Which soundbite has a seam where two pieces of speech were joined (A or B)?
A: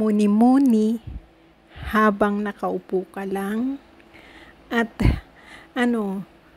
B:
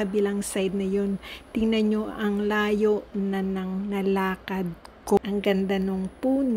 B